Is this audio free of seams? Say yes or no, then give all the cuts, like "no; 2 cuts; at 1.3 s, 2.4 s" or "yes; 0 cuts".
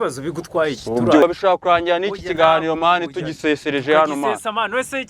no; 1 cut; at 1.2 s